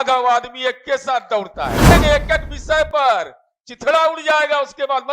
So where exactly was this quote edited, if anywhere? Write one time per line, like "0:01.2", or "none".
0:01.9